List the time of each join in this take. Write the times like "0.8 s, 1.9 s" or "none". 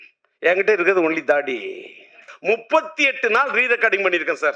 2.3 s